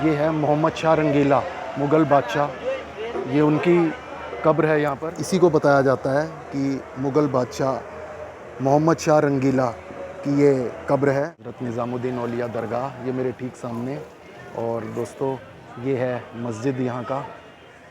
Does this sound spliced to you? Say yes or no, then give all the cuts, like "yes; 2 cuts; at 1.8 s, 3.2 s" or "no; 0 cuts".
yes; 2 cuts; at 5.1 s, 11.4 s